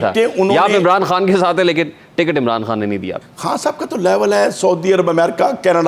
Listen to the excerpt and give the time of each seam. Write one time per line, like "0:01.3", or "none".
0:03.2